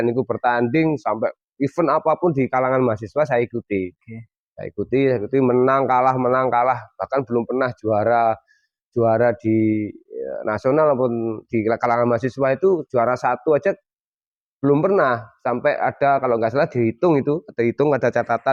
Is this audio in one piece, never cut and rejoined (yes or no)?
yes